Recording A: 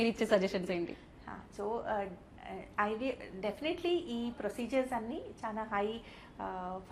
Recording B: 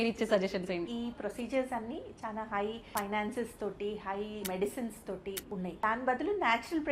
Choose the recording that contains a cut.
B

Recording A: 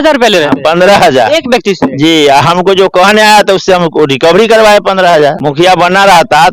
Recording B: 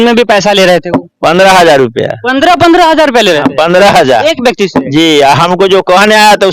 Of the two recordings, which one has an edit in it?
A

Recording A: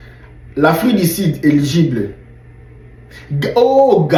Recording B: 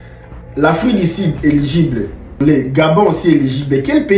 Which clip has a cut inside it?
B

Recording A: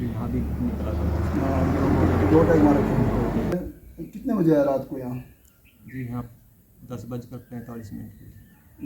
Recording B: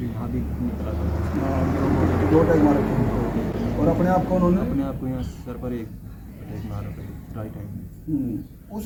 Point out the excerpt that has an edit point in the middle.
A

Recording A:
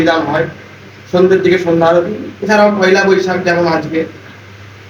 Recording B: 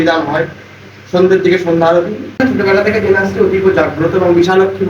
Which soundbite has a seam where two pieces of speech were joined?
B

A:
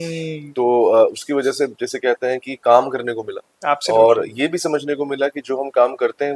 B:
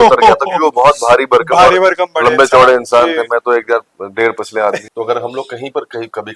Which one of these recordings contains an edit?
B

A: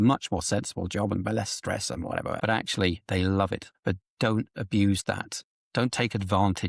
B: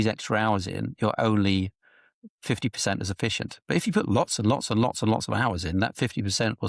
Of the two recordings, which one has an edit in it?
A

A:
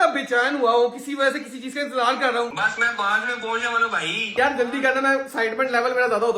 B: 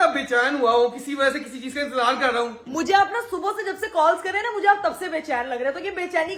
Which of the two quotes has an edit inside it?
A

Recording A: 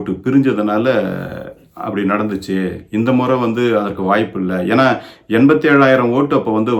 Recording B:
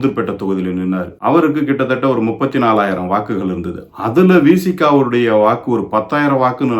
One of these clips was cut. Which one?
B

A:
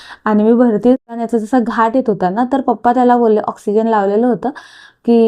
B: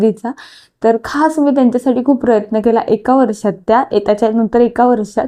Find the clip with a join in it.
A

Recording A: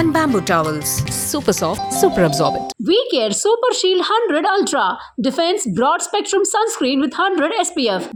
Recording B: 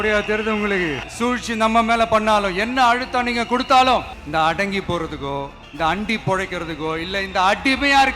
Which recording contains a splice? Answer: B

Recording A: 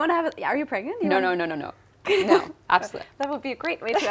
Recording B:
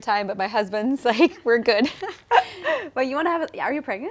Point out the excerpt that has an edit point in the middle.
B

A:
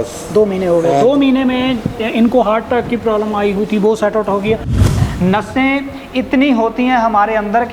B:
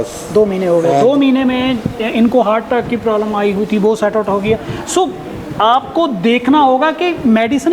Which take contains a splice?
A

